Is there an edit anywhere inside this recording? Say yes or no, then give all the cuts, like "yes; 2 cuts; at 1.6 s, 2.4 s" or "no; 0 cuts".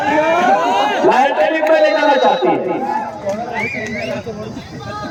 no; 0 cuts